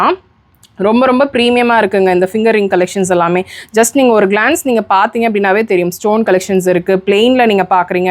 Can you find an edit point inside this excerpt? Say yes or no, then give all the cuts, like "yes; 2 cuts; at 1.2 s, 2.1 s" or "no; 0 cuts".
no; 0 cuts